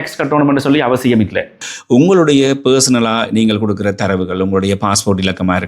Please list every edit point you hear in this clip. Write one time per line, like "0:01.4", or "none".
0:01.7